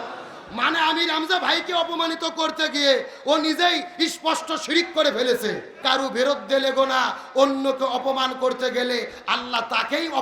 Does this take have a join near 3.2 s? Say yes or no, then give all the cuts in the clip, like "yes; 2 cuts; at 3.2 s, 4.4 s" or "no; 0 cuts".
no; 1 cut; at 5.7 s